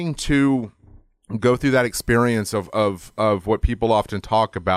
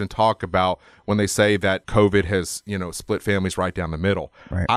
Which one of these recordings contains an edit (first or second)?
second